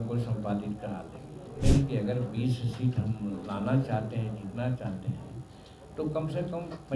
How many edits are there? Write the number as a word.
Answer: one